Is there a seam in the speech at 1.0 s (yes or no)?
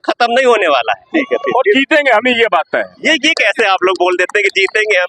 yes